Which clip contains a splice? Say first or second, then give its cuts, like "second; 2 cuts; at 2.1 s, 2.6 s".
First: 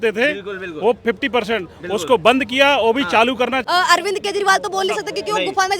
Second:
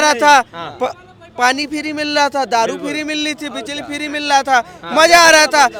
first; 1 cut; at 3.6 s